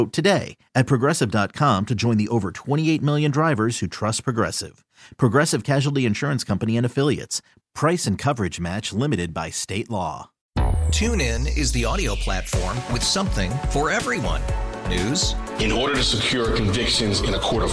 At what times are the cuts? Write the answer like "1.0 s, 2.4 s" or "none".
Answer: 10.3 s